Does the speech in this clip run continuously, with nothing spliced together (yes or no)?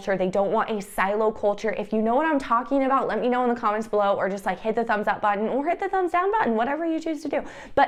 yes